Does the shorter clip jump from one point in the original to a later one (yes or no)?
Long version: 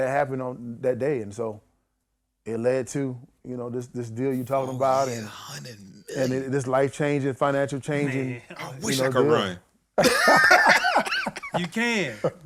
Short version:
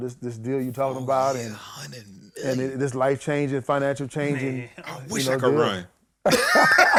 no